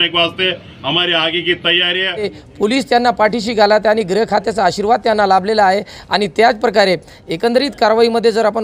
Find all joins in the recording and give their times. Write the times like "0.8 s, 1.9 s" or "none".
2.3 s